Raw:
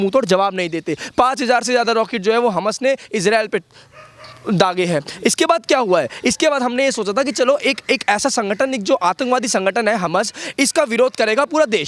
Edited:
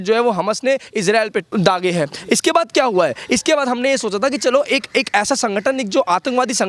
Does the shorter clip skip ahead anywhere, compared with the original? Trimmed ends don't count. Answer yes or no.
yes